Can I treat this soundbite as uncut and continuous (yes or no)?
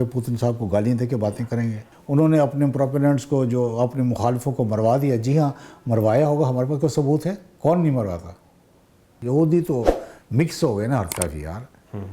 no